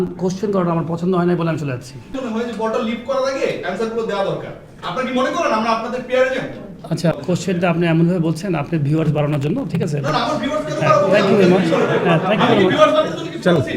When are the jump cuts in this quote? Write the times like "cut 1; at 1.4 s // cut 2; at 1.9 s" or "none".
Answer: cut 1; at 2.1 s // cut 2; at 7.1 s